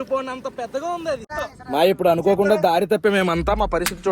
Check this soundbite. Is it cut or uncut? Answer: uncut